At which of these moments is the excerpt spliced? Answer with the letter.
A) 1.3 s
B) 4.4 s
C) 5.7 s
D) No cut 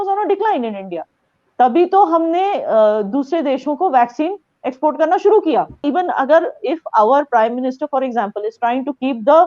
C